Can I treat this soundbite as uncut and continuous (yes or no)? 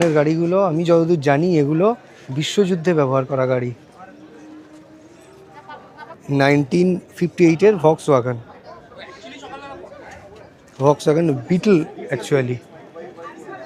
no